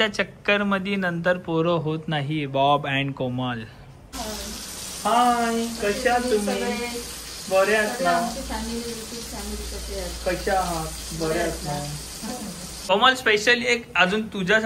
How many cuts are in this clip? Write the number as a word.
two